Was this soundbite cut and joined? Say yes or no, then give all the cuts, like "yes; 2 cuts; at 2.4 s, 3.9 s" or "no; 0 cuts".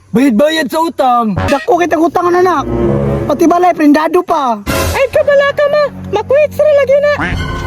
yes; 1 cut; at 1.4 s